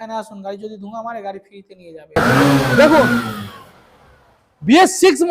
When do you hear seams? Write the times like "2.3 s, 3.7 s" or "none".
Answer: 2.2 s